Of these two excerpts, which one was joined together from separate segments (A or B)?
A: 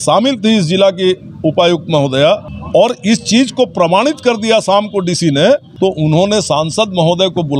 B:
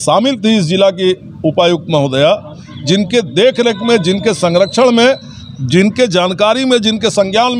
A